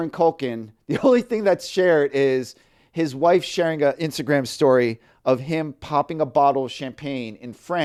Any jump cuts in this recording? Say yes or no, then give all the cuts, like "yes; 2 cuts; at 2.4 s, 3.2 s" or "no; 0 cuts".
no; 0 cuts